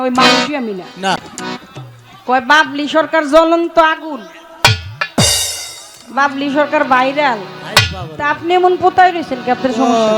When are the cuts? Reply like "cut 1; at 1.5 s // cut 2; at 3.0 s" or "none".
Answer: cut 1; at 1.2 s